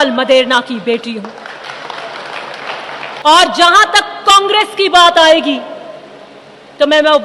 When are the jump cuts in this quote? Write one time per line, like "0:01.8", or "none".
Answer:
0:03.2